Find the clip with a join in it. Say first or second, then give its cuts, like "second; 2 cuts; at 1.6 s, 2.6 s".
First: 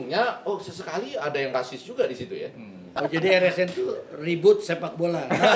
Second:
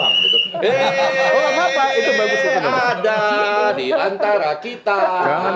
first; 1 cut; at 2.9 s